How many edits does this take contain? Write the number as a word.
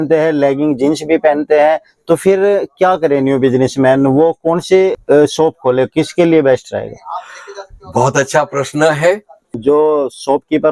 two